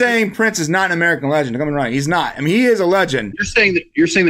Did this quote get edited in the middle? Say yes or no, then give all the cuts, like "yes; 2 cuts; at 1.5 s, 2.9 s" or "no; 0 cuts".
yes; 1 cut; at 3.4 s